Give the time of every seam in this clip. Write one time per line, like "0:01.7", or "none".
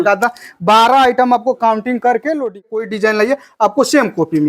0:02.9